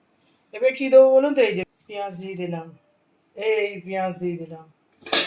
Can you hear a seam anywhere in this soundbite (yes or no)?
yes